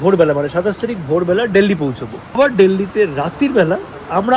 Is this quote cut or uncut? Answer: cut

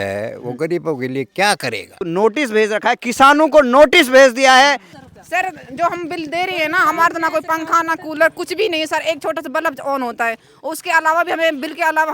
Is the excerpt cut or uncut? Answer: cut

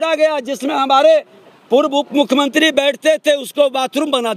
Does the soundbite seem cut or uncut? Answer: uncut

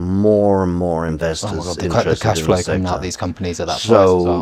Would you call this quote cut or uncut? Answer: uncut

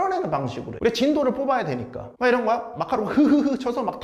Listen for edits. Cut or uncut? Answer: uncut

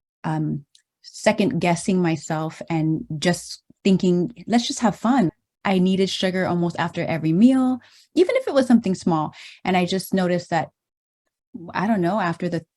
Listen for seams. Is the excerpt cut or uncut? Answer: cut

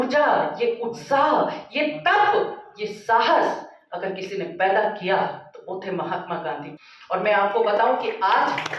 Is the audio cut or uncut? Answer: uncut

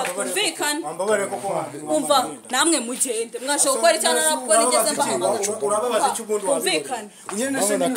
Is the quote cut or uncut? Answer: uncut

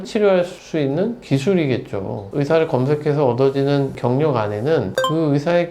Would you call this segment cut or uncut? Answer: cut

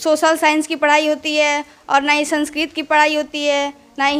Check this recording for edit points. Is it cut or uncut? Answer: uncut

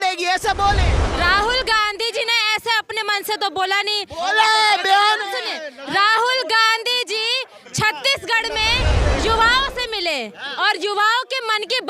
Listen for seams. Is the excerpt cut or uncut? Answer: cut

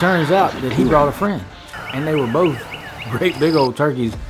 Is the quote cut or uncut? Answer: uncut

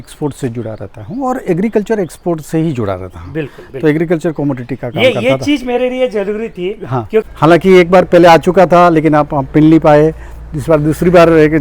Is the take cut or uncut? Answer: cut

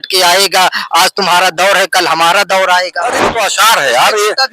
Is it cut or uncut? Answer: cut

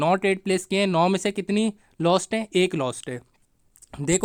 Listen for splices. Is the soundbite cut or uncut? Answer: uncut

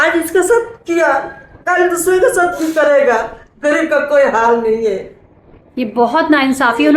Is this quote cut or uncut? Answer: uncut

